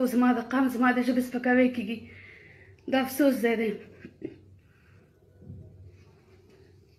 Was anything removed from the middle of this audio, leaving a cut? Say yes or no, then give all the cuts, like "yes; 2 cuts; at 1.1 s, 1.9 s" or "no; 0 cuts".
no; 0 cuts